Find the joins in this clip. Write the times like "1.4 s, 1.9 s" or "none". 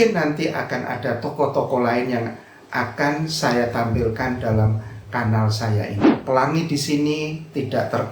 5.9 s